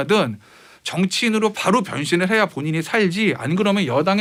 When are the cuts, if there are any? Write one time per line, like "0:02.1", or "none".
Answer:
none